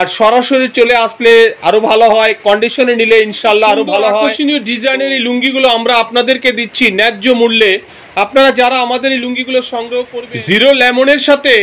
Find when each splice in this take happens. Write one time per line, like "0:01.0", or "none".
0:04.3
0:10.2